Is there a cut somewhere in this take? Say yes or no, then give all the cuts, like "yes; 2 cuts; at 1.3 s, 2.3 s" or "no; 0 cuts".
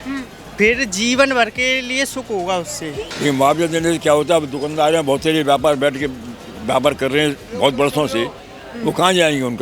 yes; 1 cut; at 3.1 s